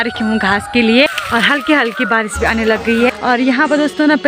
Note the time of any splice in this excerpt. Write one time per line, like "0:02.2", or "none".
0:01.2
0:03.1